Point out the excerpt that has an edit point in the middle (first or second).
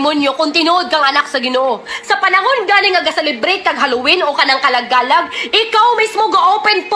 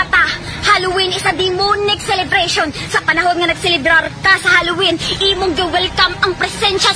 first